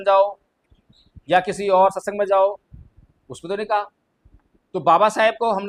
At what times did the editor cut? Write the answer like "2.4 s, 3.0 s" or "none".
none

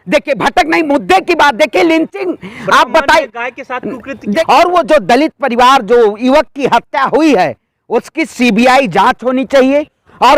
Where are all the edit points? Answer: 4.4 s

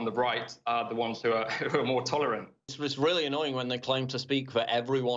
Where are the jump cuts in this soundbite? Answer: 2.7 s

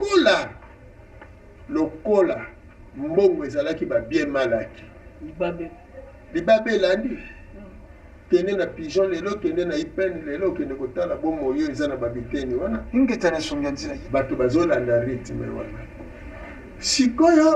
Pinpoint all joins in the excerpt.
13.8 s

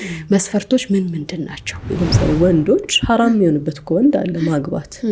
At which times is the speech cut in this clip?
1.9 s

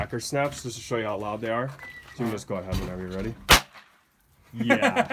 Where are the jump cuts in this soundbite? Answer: none

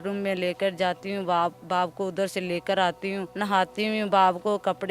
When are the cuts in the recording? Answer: 3.3 s

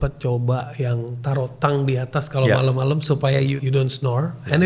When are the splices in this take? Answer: 3.6 s

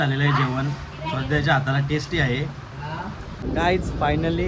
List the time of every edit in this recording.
3.4 s

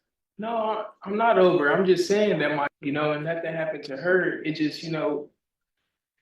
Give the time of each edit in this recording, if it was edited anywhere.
2.8 s

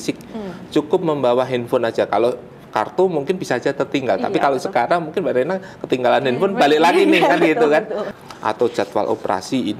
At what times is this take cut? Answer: 8.1 s

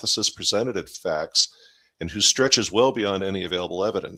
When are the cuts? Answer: none

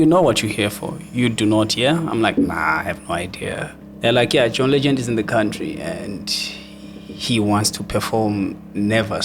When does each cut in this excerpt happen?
3.8 s

